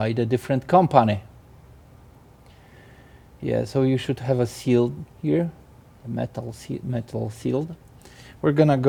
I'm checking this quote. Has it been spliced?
no; 0 cuts

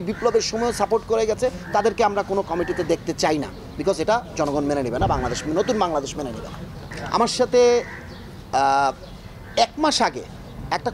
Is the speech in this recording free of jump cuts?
yes; 0 cuts

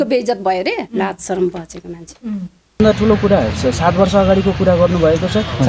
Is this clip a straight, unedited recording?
no; 1 cut; at 2.8 s

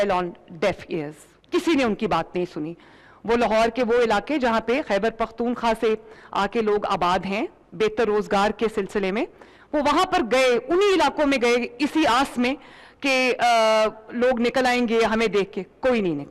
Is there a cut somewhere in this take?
no; 0 cuts

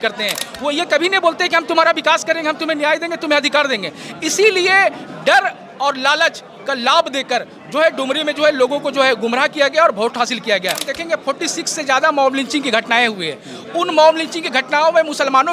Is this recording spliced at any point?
yes; 1 cut; at 10.9 s

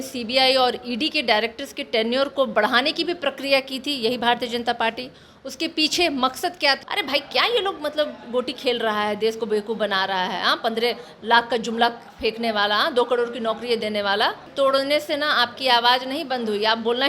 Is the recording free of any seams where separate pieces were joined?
no; 2 cuts; at 6.8 s, 14.5 s

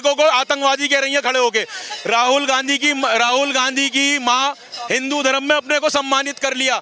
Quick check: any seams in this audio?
yes; 1 cut; at 4.7 s

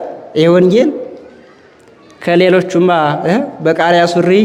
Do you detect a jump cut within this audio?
no; 0 cuts

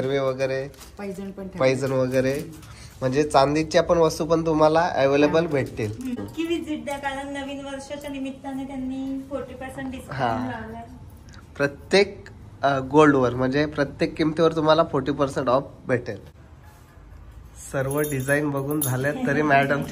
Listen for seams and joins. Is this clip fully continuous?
no; 2 cuts; at 6.2 s, 16.3 s

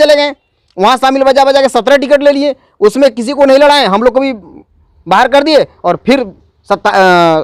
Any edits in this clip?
no; 0 cuts

